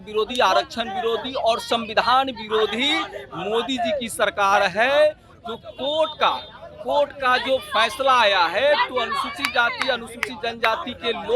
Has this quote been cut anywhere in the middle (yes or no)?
no